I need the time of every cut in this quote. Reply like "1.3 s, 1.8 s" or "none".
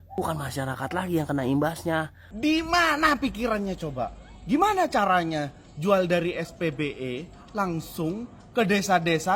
2.2 s